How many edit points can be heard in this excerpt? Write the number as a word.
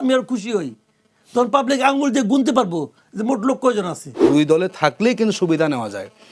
one